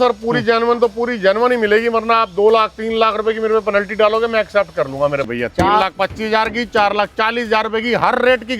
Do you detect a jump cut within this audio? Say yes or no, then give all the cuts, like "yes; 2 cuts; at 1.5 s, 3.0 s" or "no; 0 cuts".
yes; 1 cut; at 5.2 s